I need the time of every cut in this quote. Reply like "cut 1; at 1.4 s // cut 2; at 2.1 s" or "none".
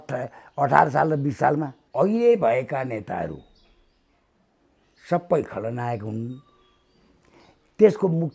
cut 1; at 1.8 s